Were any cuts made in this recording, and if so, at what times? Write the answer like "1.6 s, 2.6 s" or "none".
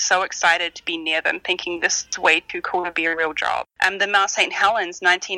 3.7 s